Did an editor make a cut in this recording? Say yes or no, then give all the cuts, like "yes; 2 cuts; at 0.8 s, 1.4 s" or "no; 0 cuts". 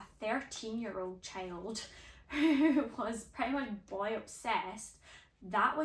no; 0 cuts